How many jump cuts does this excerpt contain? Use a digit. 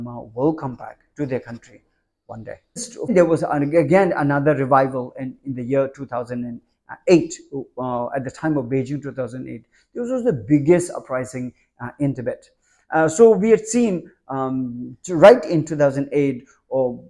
1